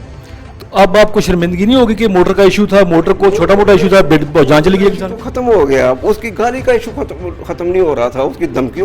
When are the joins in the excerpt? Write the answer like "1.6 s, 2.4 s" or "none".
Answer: none